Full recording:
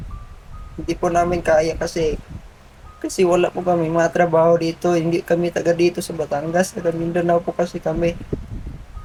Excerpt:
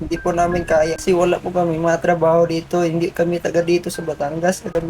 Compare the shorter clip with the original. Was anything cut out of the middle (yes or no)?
yes